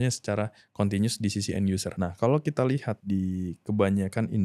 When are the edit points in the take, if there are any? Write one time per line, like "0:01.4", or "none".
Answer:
0:01.9
0:02.9